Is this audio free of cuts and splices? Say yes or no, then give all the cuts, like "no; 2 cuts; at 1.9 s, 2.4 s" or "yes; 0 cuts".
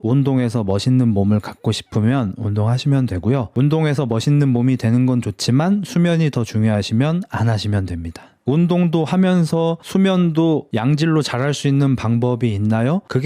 yes; 0 cuts